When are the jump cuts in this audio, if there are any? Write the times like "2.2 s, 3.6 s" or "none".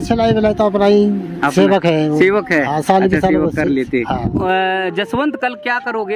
4.4 s